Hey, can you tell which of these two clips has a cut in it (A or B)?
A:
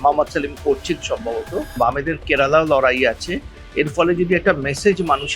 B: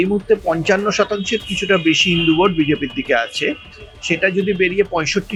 A